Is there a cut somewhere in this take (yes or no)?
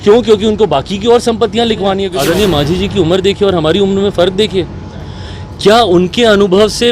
yes